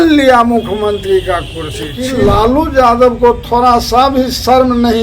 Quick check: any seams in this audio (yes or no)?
yes